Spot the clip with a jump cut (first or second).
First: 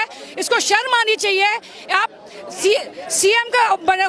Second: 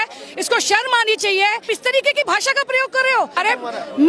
second